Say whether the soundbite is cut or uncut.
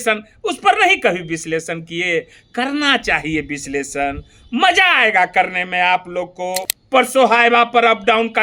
cut